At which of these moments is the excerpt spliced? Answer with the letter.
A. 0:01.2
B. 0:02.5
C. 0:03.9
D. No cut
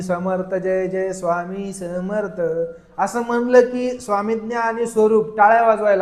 D